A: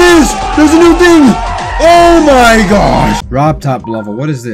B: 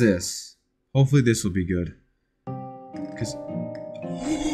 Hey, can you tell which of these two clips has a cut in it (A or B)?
A